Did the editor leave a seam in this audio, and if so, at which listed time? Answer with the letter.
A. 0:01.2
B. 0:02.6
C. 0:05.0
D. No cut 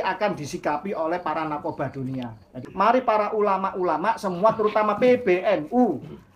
B